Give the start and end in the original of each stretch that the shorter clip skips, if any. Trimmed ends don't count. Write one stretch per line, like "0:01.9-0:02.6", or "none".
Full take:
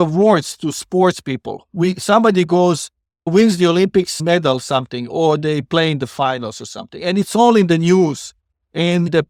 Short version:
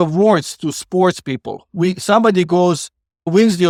none